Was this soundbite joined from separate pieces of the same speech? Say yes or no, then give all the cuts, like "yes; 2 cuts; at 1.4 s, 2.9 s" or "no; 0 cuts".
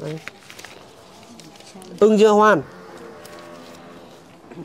no; 0 cuts